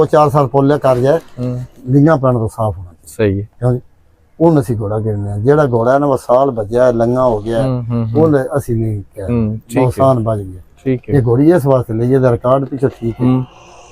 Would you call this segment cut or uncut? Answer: uncut